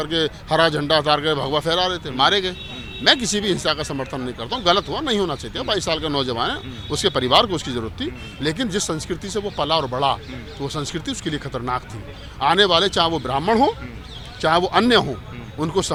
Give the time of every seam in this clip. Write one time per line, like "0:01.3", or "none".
none